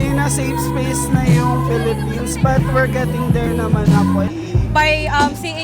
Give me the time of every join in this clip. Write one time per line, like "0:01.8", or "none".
0:04.3